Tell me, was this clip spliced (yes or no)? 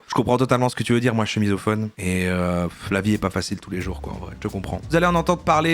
yes